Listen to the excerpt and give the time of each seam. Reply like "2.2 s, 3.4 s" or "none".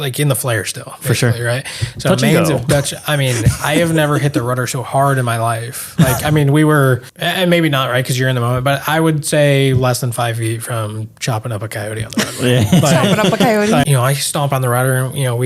7.1 s, 13.8 s